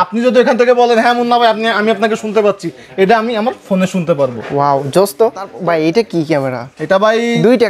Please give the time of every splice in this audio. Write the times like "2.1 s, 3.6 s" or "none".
5.5 s